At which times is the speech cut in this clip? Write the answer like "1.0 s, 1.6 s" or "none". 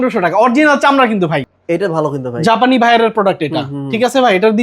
1.5 s